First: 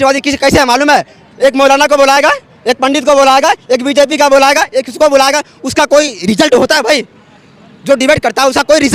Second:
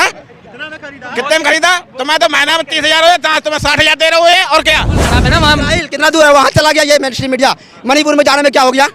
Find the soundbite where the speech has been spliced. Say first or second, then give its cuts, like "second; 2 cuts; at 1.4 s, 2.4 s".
second; 1 cut; at 5.1 s